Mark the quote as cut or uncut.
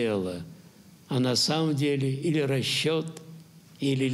uncut